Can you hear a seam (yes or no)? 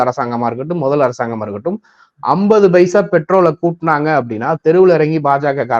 no